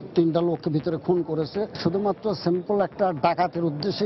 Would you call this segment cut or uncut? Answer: cut